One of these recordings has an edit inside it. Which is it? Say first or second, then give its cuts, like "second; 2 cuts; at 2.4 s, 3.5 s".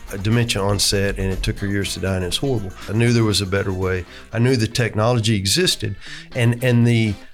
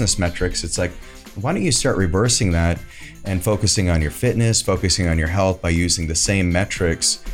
first; 1 cut; at 2.8 s